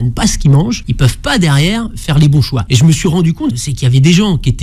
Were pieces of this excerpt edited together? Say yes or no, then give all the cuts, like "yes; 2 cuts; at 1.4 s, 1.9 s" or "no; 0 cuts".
yes; 3 cuts; at 0.9 s, 2.6 s, 3.7 s